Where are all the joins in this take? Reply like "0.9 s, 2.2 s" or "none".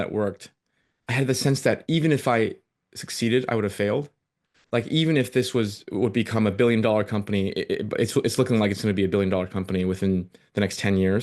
none